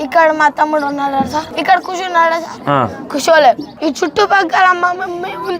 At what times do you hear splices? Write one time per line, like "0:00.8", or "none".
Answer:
0:01.5
0:02.7
0:03.7